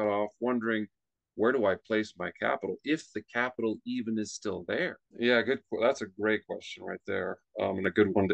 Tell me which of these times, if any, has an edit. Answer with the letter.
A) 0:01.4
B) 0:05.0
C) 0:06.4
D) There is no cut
B